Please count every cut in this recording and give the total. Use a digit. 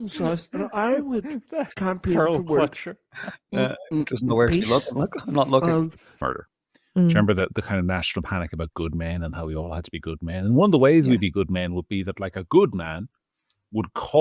1